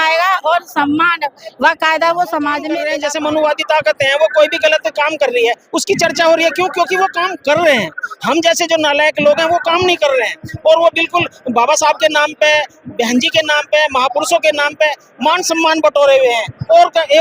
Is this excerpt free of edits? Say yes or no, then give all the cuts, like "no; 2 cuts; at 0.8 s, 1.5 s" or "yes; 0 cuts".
no; 1 cut; at 2.8 s